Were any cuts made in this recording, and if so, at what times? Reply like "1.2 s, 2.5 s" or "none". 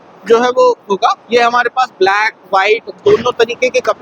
none

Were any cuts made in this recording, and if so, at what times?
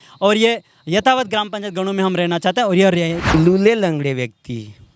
3.1 s

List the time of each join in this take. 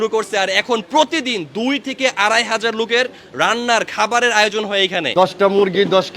5.1 s

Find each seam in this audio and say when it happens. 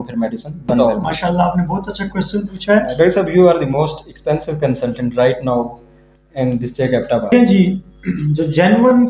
0.8 s, 2.9 s, 7.3 s

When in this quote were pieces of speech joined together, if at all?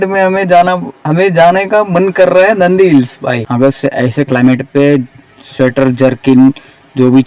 3.4 s

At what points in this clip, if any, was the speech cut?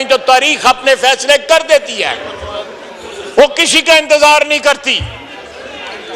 none

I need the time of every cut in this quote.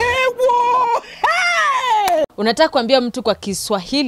2.3 s

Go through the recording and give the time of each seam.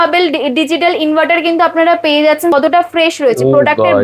2.5 s

